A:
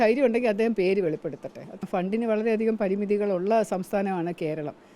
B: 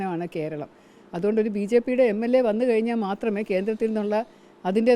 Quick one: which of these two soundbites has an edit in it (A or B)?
A